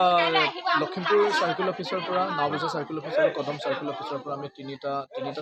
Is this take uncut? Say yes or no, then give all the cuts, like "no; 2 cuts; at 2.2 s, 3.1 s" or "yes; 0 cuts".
yes; 0 cuts